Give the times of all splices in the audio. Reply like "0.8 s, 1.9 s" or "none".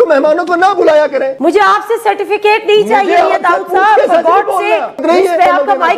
1.3 s, 4.9 s